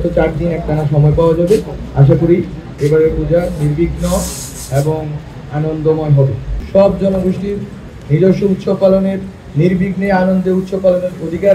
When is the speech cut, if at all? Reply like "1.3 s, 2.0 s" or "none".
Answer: 6.4 s